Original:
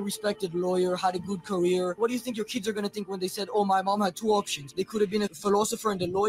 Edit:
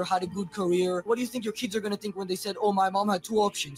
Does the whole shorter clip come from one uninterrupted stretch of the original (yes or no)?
yes